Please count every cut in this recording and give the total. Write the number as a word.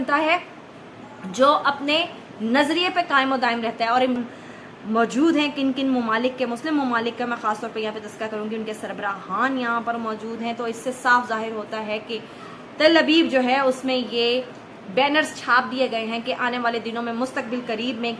one